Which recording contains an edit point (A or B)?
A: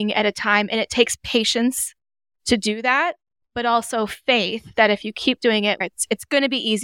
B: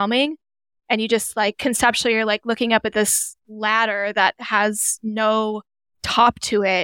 A